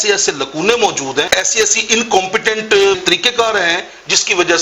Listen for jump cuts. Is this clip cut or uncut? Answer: cut